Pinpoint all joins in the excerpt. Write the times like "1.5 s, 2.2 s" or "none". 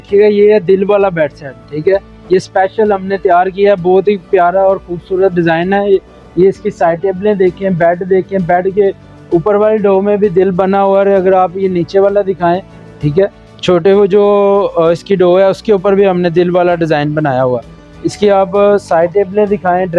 none